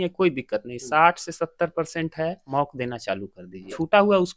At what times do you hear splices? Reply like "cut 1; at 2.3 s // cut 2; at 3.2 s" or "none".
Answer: none

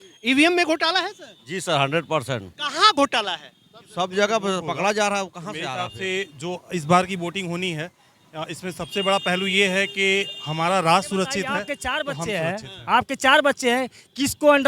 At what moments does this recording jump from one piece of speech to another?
cut 1; at 5.6 s // cut 2; at 11.6 s

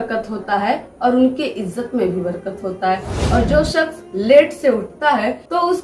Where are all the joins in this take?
none

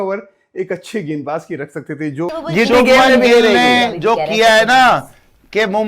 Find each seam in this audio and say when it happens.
cut 1; at 2.3 s

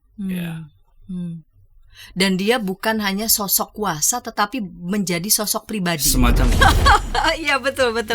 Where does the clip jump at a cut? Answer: cut 1; at 6.5 s

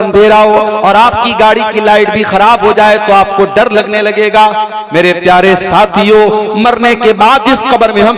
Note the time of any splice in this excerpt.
none

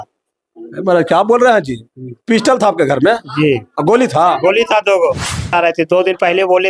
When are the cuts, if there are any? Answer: cut 1; at 5.5 s

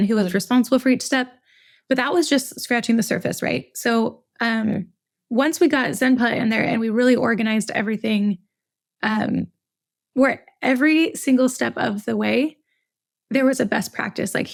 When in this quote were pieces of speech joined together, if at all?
none

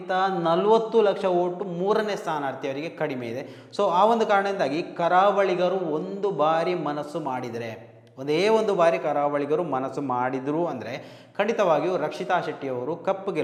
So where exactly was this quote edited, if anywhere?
none

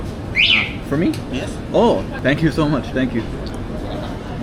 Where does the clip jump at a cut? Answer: cut 1; at 2.1 s

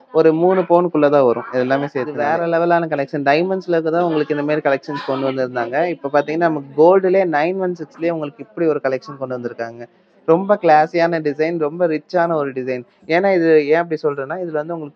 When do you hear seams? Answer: cut 1; at 2.3 s

